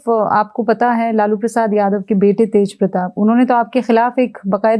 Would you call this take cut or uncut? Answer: uncut